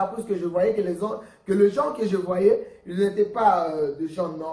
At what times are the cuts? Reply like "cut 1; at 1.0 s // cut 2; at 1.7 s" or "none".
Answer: none